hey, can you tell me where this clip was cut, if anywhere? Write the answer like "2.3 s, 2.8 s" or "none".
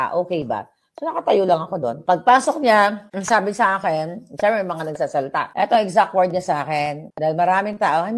2.0 s, 3.1 s, 5.5 s, 7.0 s